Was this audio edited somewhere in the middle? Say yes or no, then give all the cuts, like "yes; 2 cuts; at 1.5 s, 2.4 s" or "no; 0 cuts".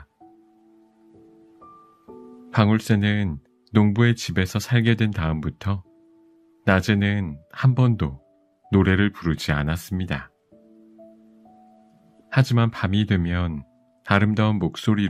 yes; 2 cuts; at 10.3 s, 12.2 s